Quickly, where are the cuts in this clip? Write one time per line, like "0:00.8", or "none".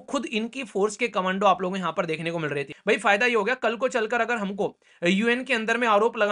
0:02.7